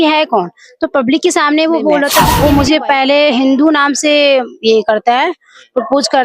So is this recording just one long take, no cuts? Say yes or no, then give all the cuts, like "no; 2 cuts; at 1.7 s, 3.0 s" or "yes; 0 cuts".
no; 1 cut; at 2.1 s